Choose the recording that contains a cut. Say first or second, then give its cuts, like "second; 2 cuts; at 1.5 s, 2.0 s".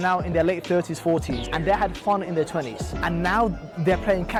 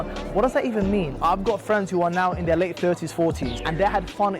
second; 1 cut; at 1.1 s